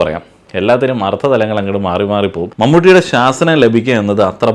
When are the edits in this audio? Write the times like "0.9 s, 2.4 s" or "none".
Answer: 2.4 s